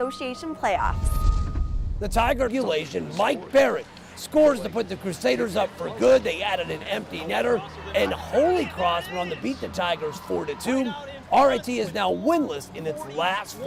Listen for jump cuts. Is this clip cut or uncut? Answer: uncut